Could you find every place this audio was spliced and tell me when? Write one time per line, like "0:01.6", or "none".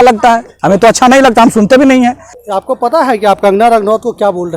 0:02.3